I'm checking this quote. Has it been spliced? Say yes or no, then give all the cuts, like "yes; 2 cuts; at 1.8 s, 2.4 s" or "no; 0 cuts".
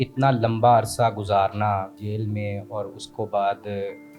yes; 1 cut; at 2.0 s